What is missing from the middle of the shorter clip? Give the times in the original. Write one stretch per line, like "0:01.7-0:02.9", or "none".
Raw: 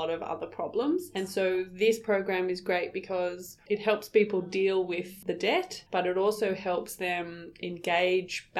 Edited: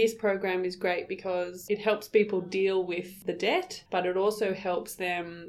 0:03.4-0:03.6